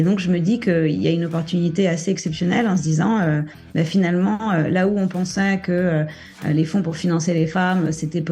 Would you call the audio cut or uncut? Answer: uncut